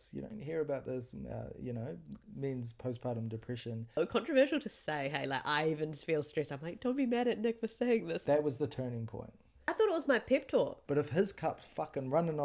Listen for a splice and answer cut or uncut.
cut